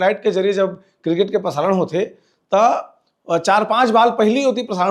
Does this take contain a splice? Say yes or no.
no